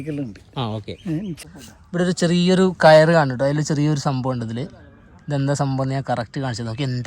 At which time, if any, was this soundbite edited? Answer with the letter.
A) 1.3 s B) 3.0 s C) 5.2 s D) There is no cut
A